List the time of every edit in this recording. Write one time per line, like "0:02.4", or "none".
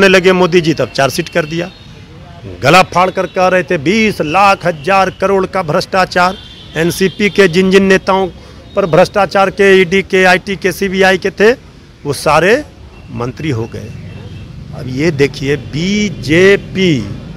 none